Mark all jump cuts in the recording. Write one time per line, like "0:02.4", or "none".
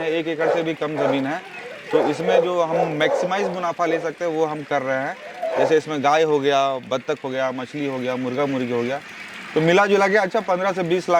none